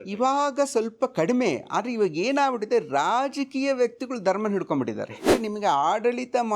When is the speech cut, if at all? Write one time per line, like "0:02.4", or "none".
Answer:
0:05.3